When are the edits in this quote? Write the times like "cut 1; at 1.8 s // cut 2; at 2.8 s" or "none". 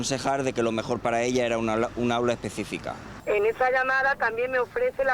cut 1; at 3.1 s

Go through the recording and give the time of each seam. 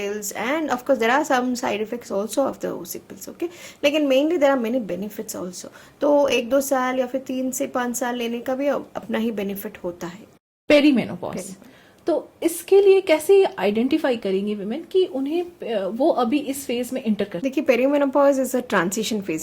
cut 1; at 10.5 s // cut 2; at 17.3 s

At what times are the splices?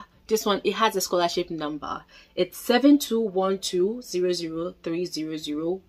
none

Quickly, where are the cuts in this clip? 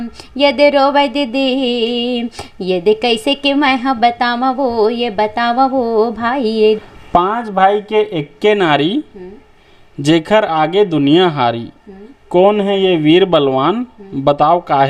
cut 1; at 6.8 s

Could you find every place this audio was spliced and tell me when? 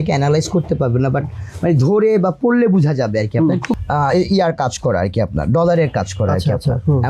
cut 1; at 3.7 s

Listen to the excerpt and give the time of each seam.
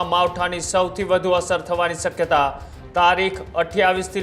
none

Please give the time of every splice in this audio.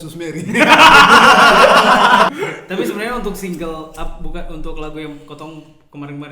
cut 1; at 2.3 s

